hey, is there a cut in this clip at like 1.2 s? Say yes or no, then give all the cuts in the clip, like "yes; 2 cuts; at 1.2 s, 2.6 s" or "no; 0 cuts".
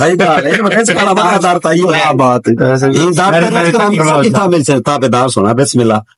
no; 0 cuts